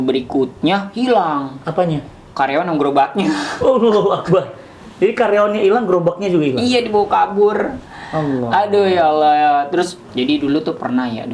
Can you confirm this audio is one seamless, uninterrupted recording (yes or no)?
no